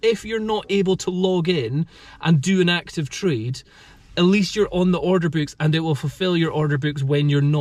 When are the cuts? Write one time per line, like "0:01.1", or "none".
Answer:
none